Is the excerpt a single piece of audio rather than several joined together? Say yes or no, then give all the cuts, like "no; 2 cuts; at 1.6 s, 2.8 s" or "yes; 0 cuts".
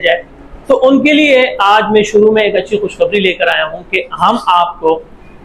yes; 0 cuts